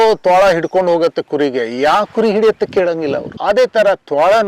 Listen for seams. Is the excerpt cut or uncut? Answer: cut